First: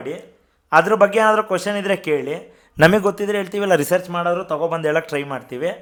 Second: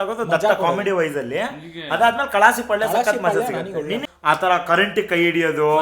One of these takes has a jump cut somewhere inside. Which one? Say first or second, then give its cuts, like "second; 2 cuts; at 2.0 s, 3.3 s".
second; 1 cut; at 4.1 s